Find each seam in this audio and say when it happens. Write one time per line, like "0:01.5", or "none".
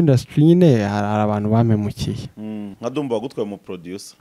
0:02.7